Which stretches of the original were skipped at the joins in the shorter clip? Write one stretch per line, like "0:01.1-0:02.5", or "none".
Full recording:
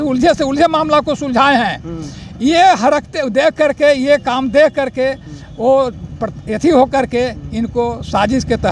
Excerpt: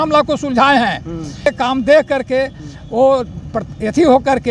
0:02.2-0:04.1